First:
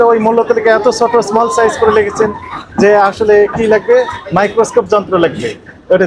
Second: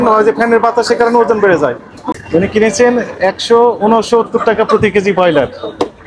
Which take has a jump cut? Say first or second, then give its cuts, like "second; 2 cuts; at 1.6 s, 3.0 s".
second; 1 cut; at 2.2 s